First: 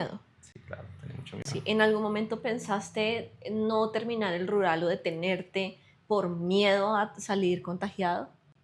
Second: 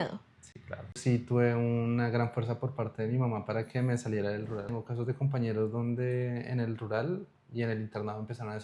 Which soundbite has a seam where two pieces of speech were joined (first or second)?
second